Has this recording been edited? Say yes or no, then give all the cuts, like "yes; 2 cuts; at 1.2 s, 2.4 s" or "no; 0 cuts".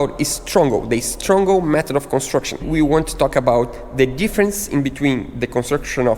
yes; 1 cut; at 2.6 s